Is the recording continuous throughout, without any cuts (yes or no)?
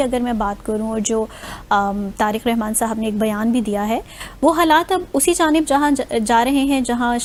yes